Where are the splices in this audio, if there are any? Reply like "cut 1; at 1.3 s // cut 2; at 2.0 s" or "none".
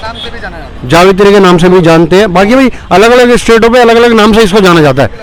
none